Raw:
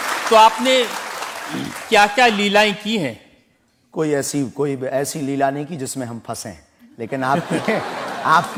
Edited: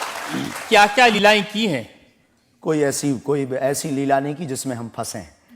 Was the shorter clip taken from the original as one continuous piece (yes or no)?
no